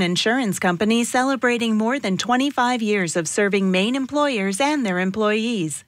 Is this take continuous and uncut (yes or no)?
yes